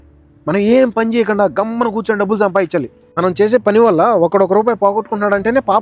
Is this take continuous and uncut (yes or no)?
no